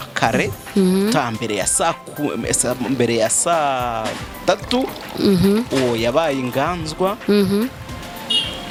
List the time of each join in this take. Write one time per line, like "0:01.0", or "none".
none